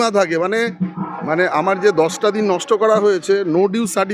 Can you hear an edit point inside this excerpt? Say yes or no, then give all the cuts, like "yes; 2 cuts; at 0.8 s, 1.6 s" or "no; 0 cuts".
yes; 1 cut; at 1.1 s